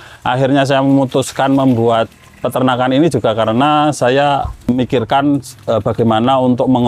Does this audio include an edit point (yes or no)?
yes